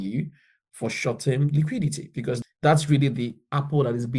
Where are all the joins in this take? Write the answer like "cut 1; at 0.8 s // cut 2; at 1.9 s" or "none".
cut 1; at 2.4 s